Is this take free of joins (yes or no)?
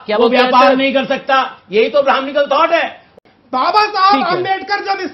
no